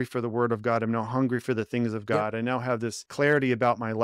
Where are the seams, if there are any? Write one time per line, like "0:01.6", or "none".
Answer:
0:03.0